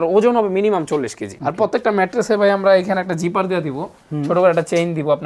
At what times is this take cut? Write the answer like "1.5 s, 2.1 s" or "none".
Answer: 1.3 s